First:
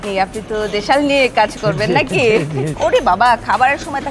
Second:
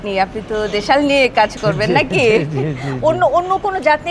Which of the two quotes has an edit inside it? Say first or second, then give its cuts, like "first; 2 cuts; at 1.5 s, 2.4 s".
first; 1 cut; at 2.7 s